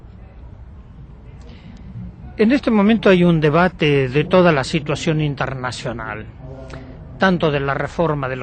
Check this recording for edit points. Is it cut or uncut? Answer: cut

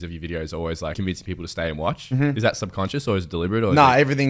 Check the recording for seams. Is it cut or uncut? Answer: cut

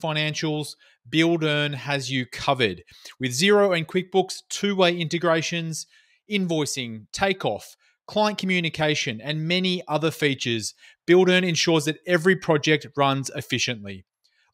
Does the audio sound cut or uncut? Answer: uncut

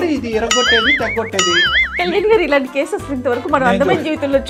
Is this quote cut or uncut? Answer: uncut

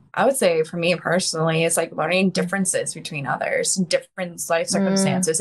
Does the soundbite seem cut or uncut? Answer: uncut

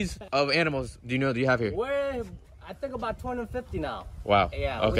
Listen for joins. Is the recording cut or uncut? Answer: uncut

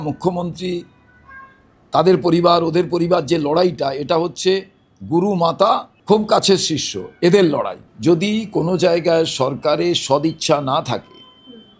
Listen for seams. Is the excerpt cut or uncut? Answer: cut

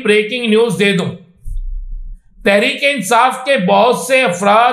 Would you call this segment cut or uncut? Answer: uncut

